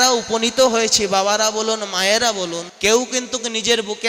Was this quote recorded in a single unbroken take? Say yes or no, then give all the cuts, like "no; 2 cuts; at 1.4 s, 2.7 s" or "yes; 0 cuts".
no; 1 cut; at 2.6 s